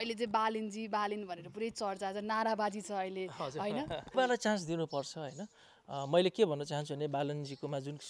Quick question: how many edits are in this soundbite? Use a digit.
1